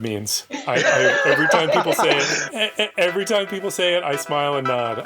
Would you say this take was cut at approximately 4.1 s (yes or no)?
no